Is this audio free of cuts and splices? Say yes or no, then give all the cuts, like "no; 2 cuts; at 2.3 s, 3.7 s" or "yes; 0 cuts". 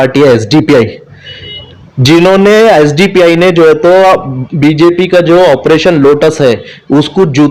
yes; 0 cuts